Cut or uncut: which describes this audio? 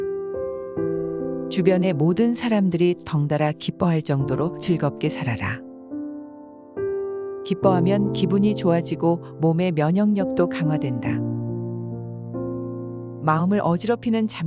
cut